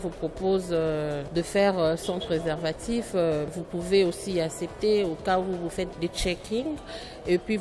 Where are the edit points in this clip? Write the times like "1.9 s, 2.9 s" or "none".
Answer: 1.2 s, 3.5 s, 5.9 s